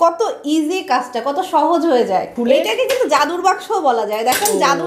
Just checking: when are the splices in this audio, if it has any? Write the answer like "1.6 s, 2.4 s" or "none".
2.3 s